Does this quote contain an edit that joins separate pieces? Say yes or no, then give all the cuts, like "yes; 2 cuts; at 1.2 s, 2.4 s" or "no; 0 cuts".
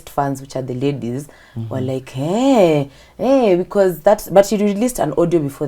no; 0 cuts